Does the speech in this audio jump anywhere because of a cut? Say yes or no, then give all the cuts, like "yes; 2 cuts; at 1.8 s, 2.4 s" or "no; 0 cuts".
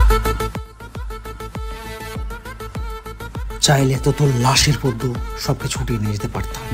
no; 0 cuts